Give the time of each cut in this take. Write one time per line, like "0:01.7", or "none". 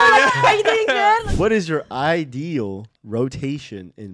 0:01.2